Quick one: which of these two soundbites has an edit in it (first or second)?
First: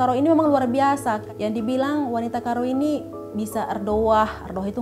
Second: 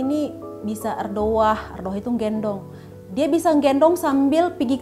first